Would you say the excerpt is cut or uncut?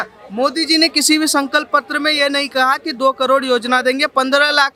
uncut